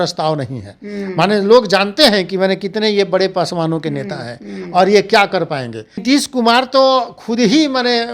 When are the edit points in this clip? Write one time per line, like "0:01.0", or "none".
0:06.0